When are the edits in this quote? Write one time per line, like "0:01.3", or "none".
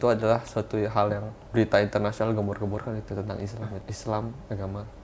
0:01.3
0:03.9